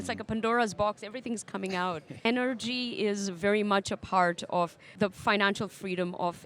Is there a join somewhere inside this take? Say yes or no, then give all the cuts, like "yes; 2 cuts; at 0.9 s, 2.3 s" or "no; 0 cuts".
yes; 2 cuts; at 2.2 s, 4.8 s